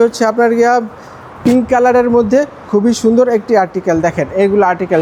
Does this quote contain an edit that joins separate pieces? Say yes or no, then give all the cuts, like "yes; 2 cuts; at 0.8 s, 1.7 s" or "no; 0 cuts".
no; 0 cuts